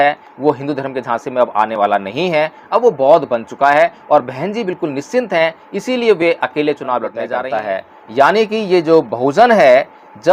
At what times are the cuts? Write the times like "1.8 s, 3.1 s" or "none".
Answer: 7.2 s